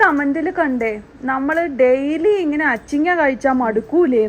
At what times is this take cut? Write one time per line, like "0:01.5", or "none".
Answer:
none